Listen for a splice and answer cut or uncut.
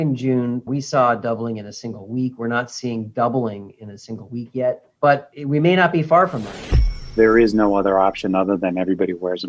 cut